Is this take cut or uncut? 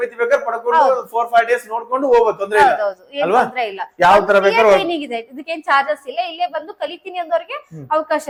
uncut